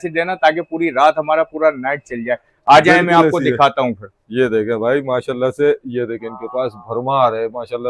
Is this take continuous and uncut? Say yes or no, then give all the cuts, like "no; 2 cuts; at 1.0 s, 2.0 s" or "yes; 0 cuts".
yes; 0 cuts